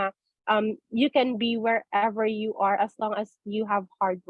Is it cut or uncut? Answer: uncut